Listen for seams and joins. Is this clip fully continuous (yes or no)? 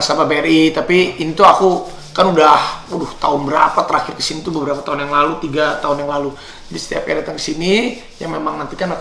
yes